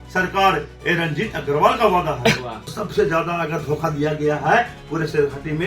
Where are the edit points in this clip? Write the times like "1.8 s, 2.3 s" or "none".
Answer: 2.7 s